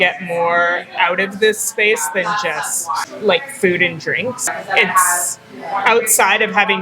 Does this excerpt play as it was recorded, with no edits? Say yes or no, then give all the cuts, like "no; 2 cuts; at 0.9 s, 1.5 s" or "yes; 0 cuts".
no; 2 cuts; at 3.1 s, 4.6 s